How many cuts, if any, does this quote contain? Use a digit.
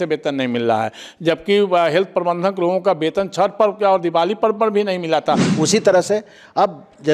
1